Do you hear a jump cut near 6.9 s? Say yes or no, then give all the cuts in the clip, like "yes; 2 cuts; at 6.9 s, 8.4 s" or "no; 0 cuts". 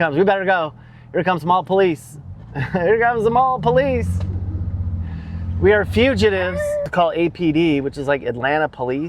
yes; 1 cut; at 6.9 s